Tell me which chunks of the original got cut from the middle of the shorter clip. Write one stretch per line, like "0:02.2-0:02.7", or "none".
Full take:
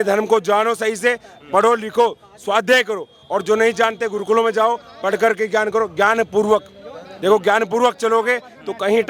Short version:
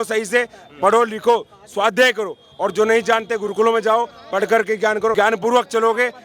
0:05.8-0:07.4